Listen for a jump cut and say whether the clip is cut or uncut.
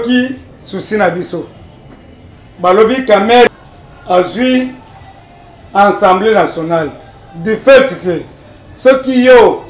cut